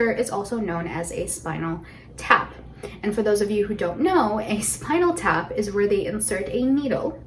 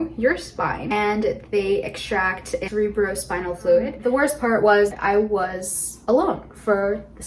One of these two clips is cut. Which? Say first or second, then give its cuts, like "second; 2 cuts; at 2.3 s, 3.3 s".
second; 1 cut; at 4.0 s